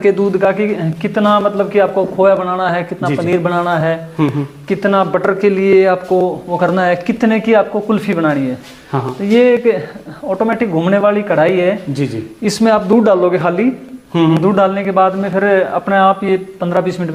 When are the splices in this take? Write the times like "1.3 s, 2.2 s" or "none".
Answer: none